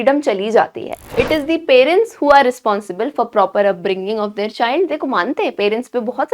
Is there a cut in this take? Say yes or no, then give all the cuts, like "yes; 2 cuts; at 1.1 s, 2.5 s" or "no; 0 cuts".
yes; 1 cut; at 1.0 s